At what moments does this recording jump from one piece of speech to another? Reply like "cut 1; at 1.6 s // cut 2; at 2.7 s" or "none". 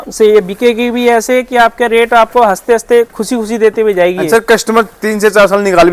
none